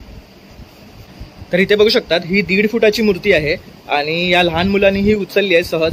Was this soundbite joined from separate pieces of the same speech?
yes; 1 cut; at 1.3 s

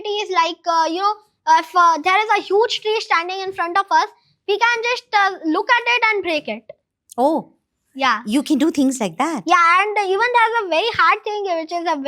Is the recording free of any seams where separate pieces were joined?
yes; 0 cuts

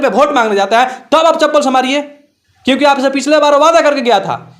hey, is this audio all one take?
yes; 0 cuts

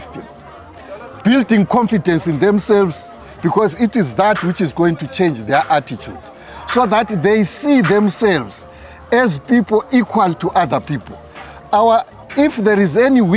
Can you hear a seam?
no; 0 cuts

